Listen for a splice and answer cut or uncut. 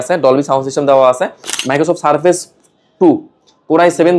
cut